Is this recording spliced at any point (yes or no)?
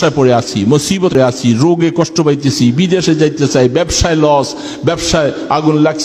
yes